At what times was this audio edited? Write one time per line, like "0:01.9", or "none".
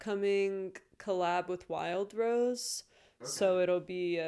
none